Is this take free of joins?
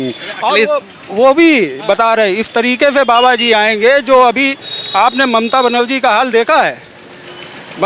yes; 0 cuts

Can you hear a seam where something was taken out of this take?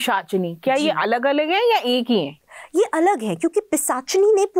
no; 0 cuts

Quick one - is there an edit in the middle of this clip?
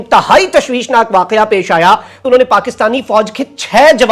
yes; 1 cut; at 2.2 s

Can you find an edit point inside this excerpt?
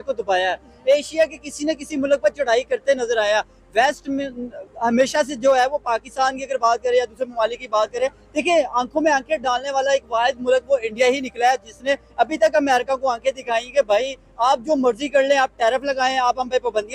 no; 0 cuts

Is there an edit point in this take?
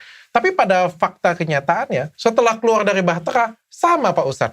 yes; 1 cut; at 2.1 s

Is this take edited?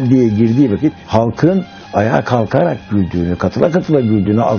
yes; 1 cut; at 1.0 s

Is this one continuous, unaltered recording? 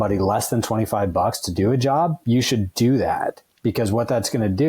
yes; 0 cuts

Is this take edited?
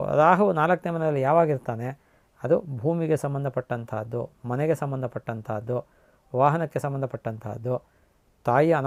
no; 0 cuts

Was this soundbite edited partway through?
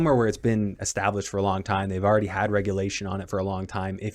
no; 0 cuts

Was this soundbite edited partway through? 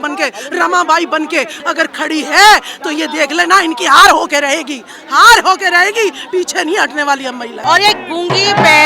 yes; 2 cuts; at 1.6 s, 7.6 s

